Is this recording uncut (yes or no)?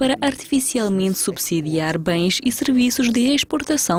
yes